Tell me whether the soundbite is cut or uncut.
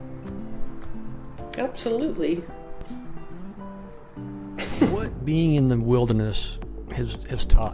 cut